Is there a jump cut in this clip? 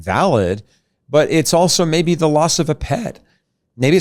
no; 0 cuts

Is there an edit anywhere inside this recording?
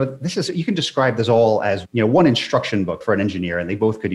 yes; 1 cut; at 3.0 s

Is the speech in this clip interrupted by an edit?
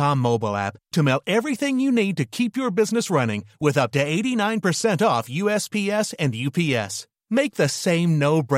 no; 0 cuts

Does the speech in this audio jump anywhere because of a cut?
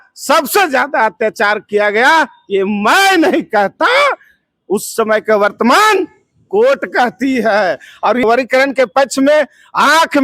yes; 1 cut; at 8.2 s

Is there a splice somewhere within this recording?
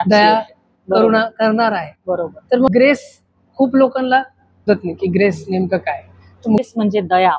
yes; 3 cuts; at 2.7 s, 4.7 s, 6.6 s

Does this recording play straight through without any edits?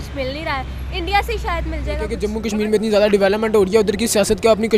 yes; 0 cuts

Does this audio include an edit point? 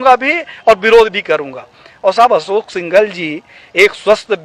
no; 0 cuts

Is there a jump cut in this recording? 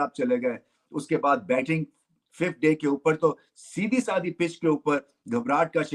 no; 0 cuts

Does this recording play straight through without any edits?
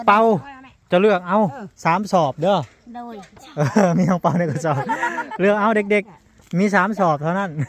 yes; 0 cuts

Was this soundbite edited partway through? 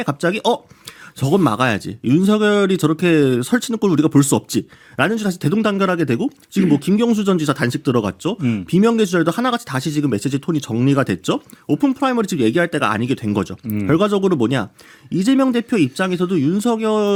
no; 0 cuts

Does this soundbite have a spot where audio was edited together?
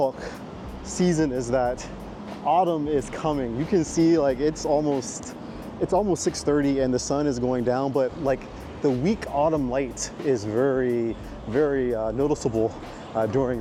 no; 0 cuts

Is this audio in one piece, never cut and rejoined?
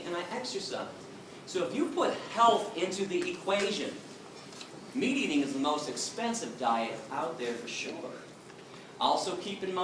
yes; 0 cuts

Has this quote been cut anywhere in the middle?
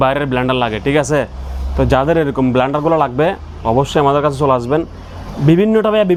no; 0 cuts

